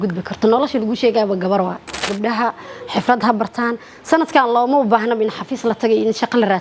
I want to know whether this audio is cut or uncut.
cut